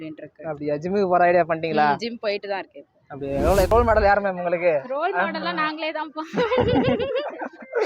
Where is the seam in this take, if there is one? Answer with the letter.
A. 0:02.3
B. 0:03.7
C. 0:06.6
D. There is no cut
B